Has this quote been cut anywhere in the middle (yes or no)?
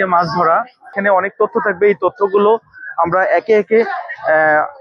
yes